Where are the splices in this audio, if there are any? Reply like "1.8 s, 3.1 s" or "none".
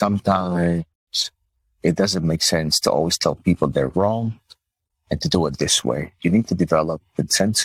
none

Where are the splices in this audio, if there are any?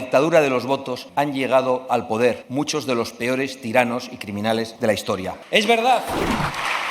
1.0 s, 2.4 s, 4.9 s

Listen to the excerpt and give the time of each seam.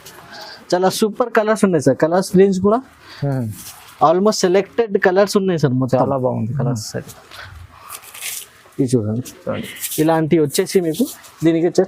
none

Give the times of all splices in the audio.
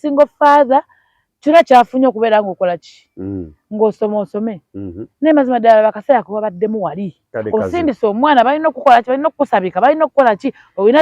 7.2 s

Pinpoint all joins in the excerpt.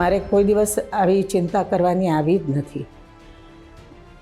3.3 s

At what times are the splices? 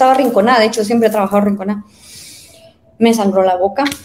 none

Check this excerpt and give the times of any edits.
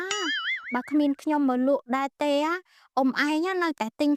none

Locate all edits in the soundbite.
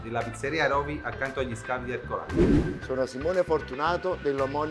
2.3 s, 2.8 s

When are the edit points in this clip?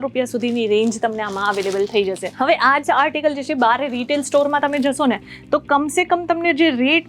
2.4 s

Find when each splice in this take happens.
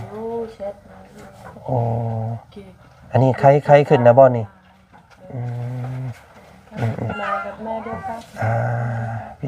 7.1 s

